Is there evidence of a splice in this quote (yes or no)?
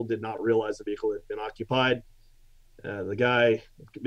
no